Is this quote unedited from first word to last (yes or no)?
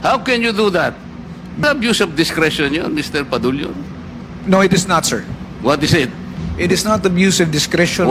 no